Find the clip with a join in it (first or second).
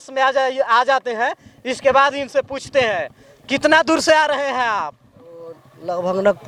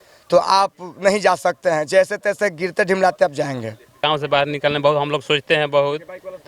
second